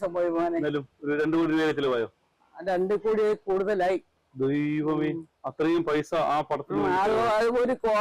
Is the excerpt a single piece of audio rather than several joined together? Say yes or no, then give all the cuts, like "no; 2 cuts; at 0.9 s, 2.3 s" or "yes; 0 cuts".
yes; 0 cuts